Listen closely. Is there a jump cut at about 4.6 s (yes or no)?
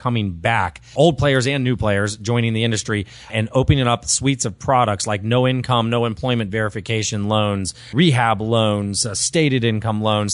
no